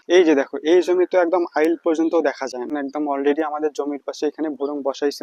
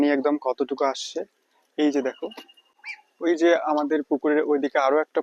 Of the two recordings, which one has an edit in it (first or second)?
first